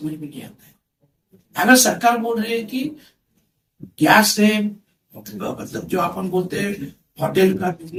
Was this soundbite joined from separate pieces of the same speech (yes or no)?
no